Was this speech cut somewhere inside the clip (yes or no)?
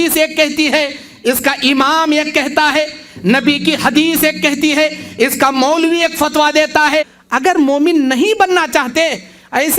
yes